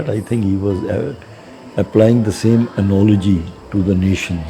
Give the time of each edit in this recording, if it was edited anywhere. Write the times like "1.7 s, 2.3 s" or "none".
3.6 s